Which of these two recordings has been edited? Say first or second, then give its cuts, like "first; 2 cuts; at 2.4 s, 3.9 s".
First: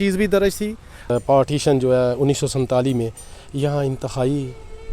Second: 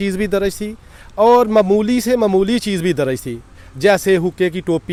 first; 1 cut; at 1.1 s